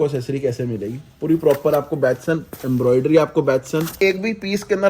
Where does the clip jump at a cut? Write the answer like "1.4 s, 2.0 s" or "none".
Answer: 4.0 s